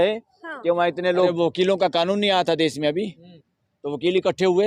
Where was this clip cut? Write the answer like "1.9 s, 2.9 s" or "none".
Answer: 1.3 s